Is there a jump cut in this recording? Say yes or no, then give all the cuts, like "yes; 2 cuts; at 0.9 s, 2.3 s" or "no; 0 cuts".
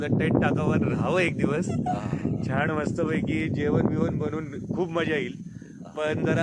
no; 0 cuts